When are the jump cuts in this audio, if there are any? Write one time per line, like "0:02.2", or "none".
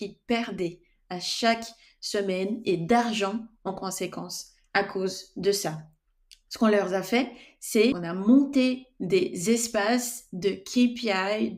0:07.9

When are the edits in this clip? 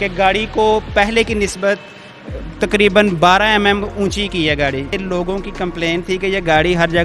0:04.9

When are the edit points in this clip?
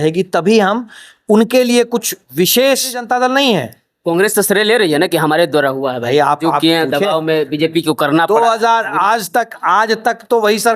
0:03.0

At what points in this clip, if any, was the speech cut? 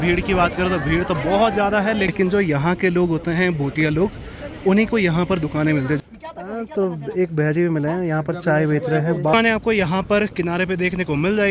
0:02.1
0:06.0
0:09.3

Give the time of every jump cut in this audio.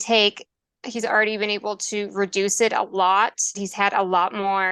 0:03.7

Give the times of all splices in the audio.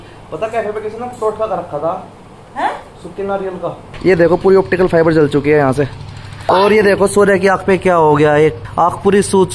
0:03.9
0:06.3
0:08.6

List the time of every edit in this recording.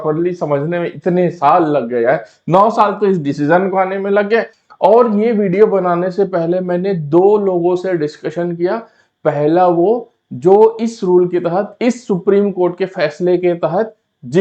0:04.6

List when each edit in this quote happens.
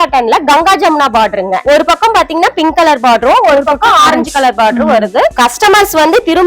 0:01.6
0:05.3

